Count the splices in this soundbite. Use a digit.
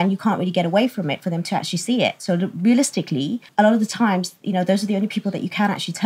1